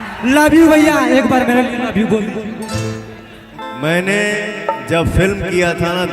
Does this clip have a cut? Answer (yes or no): yes